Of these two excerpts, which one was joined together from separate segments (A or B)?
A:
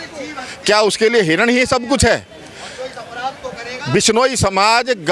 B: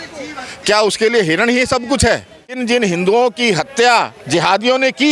B